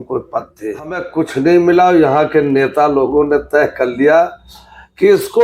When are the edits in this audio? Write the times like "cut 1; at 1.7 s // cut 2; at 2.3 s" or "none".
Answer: cut 1; at 1.1 s